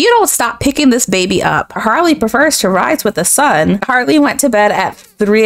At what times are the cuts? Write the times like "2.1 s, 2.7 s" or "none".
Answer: 1.8 s, 3.8 s